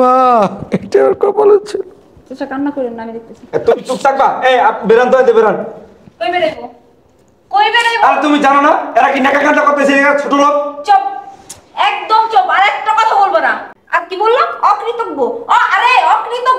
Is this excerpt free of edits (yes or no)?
no